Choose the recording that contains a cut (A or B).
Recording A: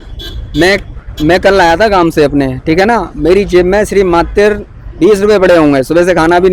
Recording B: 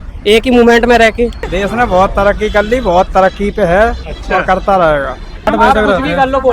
B